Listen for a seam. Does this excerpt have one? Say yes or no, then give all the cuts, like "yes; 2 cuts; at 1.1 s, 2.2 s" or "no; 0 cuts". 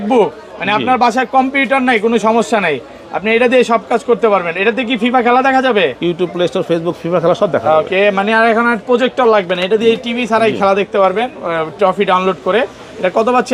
no; 0 cuts